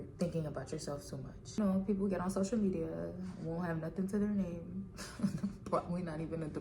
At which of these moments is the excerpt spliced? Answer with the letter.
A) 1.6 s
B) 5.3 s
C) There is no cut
A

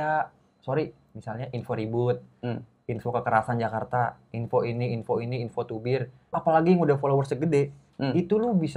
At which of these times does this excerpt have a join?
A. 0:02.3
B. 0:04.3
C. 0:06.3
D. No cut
C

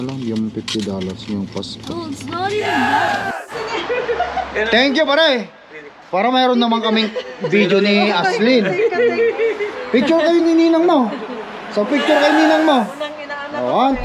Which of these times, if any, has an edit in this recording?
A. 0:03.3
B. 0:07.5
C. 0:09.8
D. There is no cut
A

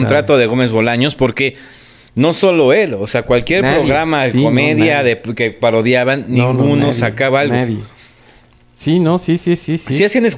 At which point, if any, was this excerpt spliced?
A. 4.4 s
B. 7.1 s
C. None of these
C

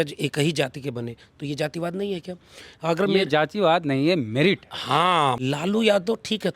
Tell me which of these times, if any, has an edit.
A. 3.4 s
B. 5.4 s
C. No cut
B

